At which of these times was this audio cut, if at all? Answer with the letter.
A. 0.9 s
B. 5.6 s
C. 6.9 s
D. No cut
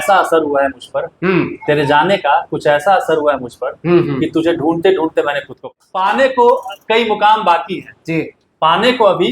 B